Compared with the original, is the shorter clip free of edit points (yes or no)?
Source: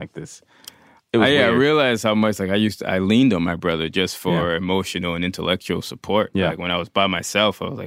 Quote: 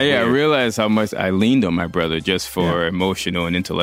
no